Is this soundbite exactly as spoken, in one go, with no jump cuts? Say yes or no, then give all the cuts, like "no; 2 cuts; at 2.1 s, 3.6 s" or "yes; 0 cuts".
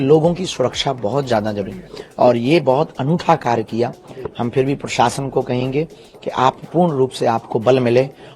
yes; 0 cuts